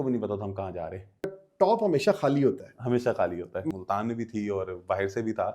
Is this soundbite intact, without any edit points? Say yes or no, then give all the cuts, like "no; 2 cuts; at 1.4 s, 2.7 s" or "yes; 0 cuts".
no; 2 cuts; at 1.4 s, 3.6 s